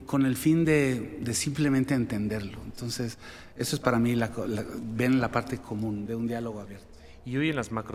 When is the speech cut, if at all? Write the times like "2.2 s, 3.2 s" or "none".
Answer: none